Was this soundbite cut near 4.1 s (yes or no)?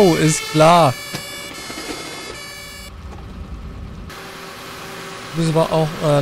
yes